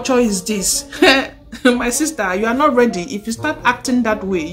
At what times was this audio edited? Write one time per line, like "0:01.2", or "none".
0:03.1